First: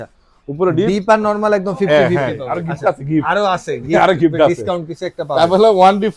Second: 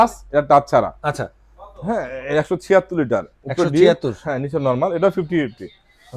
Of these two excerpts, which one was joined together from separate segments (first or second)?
first